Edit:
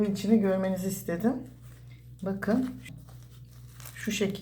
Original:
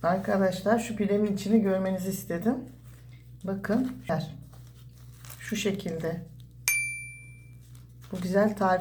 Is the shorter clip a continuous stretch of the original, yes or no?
no